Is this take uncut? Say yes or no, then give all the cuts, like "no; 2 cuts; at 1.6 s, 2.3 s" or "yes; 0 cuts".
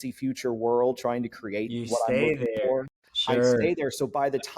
yes; 0 cuts